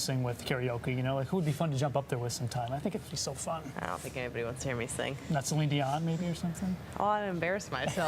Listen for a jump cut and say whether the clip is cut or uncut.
uncut